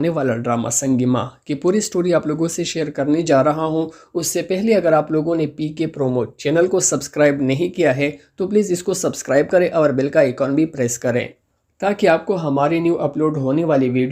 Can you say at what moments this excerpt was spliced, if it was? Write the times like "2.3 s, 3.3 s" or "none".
none